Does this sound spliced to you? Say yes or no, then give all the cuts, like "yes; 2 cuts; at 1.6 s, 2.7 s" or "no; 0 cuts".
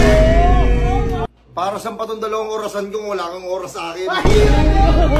yes; 1 cut; at 1.3 s